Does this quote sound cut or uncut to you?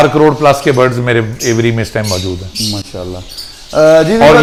uncut